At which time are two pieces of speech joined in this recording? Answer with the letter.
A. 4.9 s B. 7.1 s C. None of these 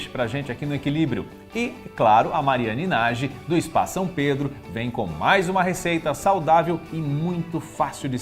A